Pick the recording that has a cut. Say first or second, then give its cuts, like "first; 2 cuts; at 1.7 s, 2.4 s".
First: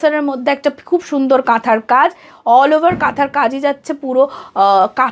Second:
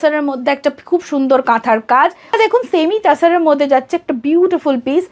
second; 1 cut; at 2.4 s